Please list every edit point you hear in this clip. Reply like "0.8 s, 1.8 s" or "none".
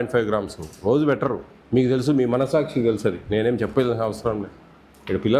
1.5 s